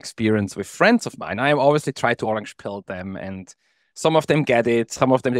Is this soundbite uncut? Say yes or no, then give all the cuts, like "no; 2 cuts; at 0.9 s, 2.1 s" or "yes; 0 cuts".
yes; 0 cuts